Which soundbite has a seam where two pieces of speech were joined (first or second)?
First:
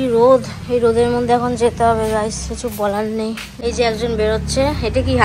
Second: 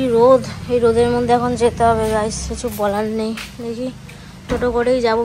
first